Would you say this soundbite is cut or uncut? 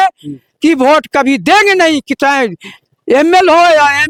uncut